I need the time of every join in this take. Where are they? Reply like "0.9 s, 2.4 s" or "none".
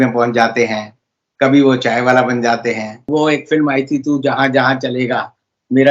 2.9 s